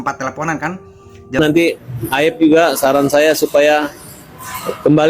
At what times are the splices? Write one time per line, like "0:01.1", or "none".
0:01.4